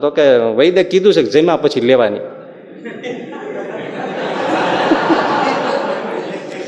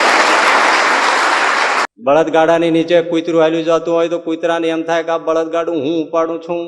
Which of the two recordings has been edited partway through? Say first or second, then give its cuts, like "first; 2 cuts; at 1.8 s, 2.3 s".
second; 1 cut; at 1.9 s